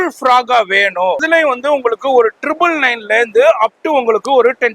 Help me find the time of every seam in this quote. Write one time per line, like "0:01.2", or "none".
0:01.2

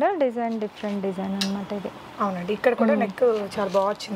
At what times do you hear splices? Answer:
none

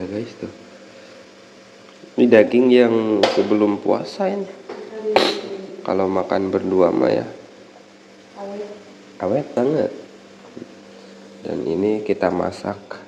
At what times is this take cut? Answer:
none

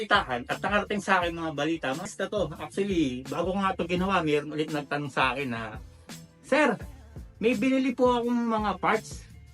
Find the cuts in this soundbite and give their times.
0:02.1

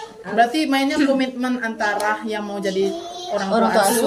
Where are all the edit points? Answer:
none

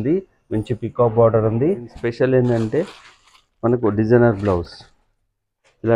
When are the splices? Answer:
0:02.0

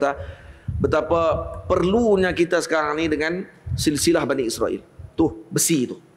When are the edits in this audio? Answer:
none

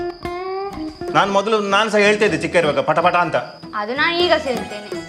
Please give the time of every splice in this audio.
0:01.0

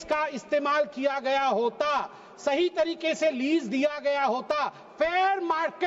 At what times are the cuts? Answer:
none

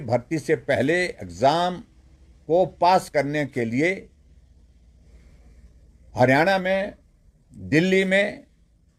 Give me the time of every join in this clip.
none

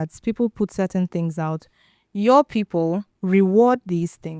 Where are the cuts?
0:03.1

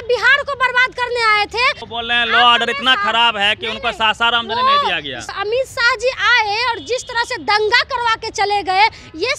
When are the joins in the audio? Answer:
0:01.9
0:05.3

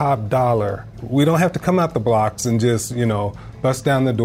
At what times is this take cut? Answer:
0:01.0

